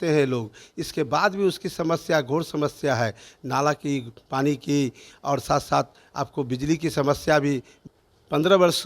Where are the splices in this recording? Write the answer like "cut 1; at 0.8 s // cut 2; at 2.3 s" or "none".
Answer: cut 1; at 7.7 s